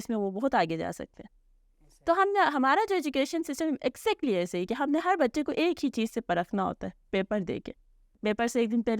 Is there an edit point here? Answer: yes; 1 cut; at 8.1 s

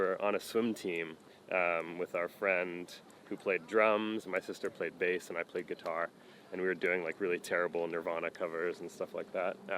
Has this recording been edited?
no; 0 cuts

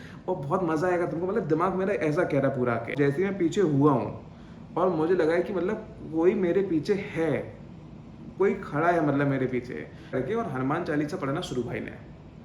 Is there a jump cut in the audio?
yes; 2 cuts; at 2.9 s, 10.1 s

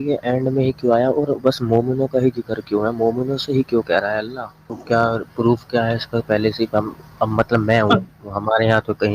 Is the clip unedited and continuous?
no; 1 cut; at 4.8 s

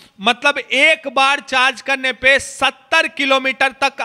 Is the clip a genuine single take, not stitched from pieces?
yes; 0 cuts

